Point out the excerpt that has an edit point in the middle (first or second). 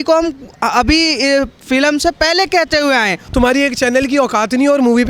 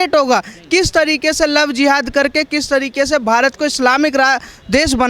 first